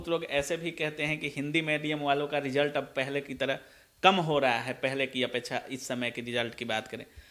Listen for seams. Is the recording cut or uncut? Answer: uncut